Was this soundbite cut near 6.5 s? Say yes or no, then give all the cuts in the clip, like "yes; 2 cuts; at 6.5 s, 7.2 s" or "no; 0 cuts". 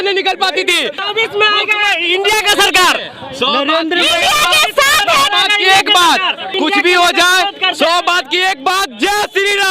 yes; 2 cuts; at 1.0 s, 6.5 s